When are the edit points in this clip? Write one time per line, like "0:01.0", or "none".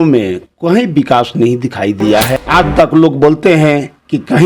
0:02.4